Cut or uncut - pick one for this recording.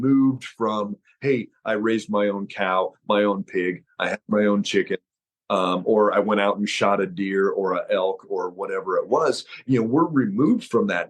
uncut